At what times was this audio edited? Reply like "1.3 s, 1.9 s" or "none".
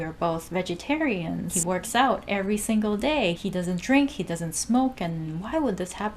1.6 s, 3.4 s